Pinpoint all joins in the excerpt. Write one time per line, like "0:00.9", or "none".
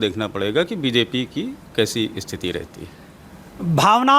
none